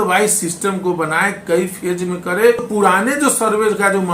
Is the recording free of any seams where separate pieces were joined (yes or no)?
no